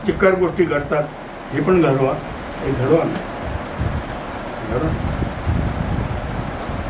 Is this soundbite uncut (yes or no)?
yes